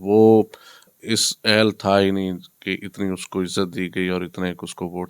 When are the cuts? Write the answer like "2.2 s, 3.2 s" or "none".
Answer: 0.9 s